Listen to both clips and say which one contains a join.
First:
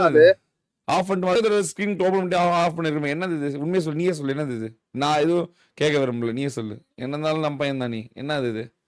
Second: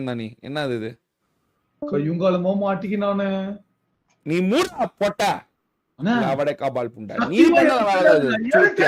first; 1 cut; at 1.4 s

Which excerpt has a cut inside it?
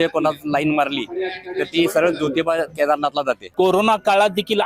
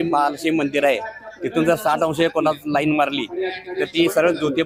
first; 1 cut; at 3.4 s

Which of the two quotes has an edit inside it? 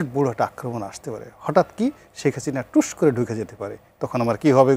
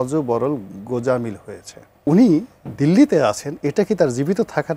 second; 1 cut; at 2.1 s

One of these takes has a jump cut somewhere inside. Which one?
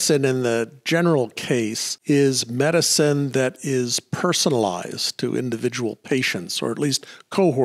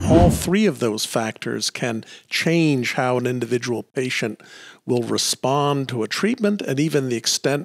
first; 1 cut; at 1.9 s

